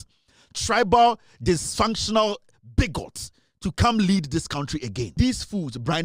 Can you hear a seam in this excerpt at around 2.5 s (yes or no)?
no